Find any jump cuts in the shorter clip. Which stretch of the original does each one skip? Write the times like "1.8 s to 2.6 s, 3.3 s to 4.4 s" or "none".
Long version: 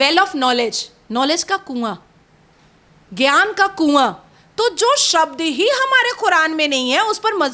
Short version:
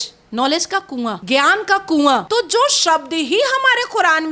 2.0 s to 3.1 s, 4.1 s to 4.5 s